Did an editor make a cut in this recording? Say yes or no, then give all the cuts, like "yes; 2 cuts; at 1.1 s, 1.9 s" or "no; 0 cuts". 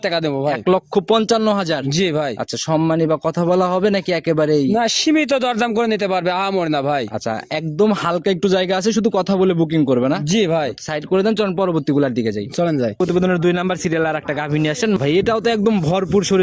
no; 0 cuts